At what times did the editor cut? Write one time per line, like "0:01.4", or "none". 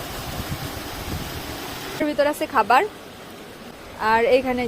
0:02.0